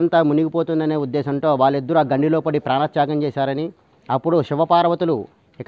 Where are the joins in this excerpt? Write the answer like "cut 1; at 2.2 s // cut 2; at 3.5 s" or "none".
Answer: none